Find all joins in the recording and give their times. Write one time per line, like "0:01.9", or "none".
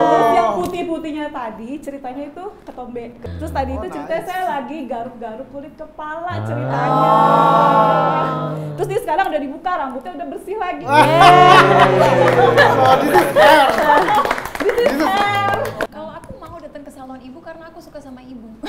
0:15.8